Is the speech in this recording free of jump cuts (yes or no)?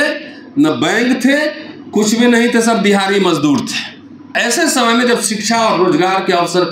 no